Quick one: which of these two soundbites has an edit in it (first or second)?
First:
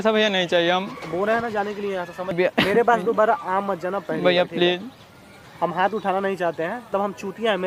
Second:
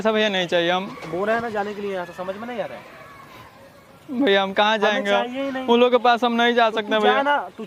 first